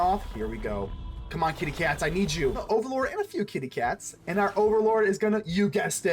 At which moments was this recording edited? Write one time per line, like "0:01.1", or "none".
0:02.6